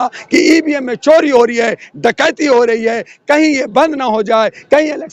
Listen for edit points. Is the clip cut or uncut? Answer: uncut